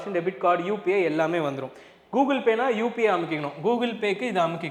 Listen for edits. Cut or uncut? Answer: uncut